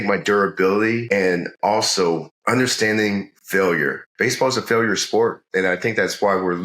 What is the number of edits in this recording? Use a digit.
3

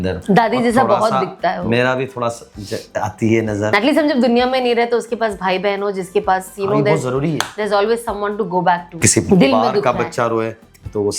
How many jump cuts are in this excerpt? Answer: 2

